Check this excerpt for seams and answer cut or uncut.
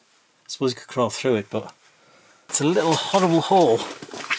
cut